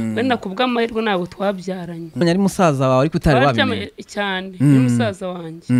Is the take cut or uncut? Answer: cut